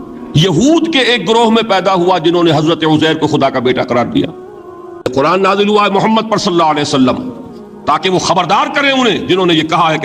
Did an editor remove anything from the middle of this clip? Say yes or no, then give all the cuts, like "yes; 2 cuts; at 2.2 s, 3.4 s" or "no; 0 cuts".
yes; 1 cut; at 5.0 s